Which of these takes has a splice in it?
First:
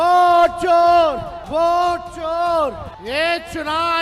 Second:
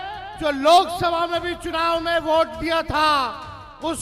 first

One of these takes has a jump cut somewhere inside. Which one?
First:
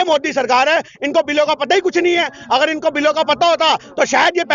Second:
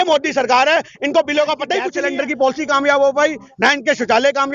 second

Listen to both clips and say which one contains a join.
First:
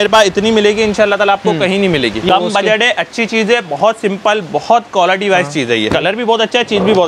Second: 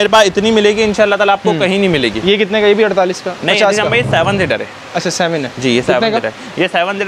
first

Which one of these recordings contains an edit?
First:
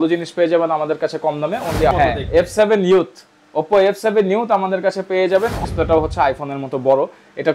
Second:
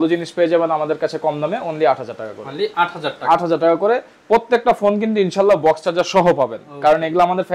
first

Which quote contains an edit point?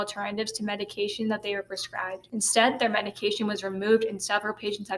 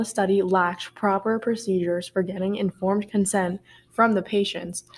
first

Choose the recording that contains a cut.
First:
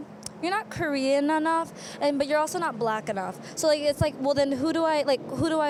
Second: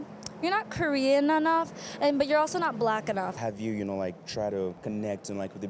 second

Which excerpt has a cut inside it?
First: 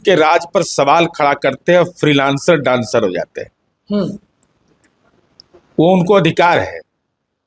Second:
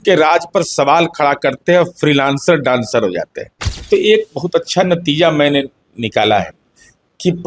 second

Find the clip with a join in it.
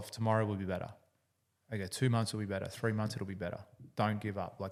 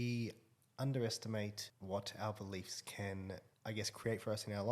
second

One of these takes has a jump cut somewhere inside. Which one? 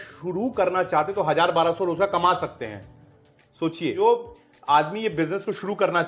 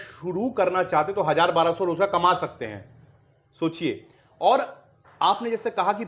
first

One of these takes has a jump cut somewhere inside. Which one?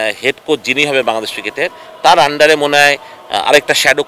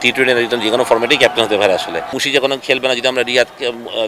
second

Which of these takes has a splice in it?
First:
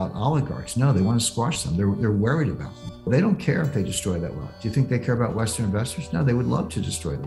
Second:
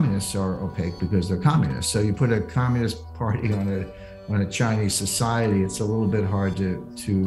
first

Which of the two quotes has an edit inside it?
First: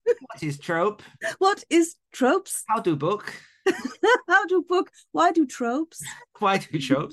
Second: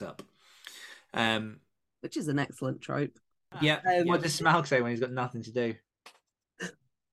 second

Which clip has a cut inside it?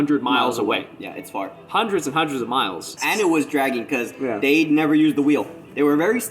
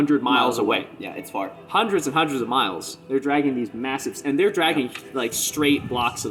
first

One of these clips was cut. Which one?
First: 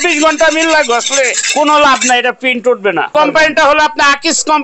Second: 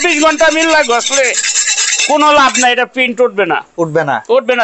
first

